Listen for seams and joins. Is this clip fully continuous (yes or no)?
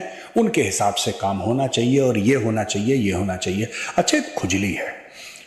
no